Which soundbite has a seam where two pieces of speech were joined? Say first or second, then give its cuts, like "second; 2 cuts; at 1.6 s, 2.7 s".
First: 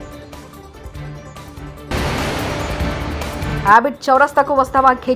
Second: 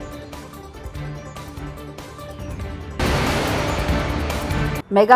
first; 2 cuts; at 1.9 s, 3.5 s